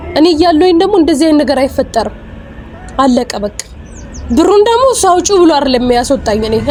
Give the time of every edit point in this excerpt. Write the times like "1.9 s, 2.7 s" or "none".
none